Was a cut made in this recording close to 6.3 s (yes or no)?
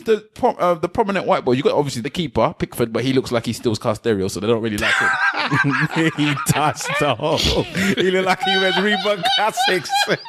no